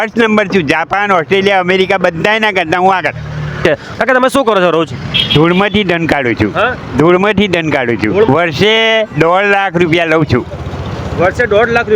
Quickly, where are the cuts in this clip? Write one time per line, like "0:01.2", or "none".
0:03.6
0:08.3